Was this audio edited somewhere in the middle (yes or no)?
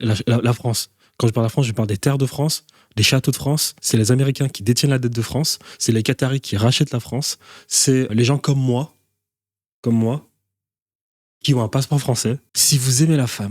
yes